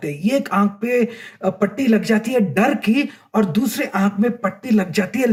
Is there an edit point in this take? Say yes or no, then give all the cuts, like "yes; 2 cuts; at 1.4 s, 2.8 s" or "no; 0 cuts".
no; 0 cuts